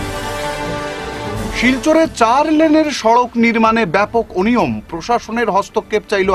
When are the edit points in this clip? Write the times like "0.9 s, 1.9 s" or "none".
1.2 s